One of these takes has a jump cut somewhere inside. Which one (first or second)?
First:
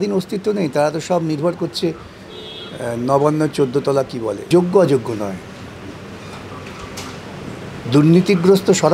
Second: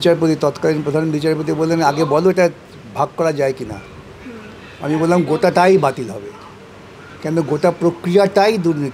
first